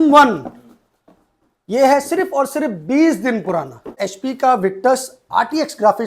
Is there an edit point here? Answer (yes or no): yes